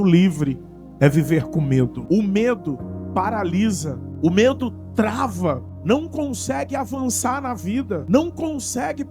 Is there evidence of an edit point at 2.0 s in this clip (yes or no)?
yes